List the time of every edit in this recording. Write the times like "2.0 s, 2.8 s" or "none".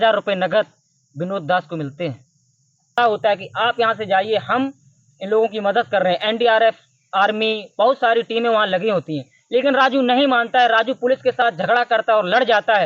3.0 s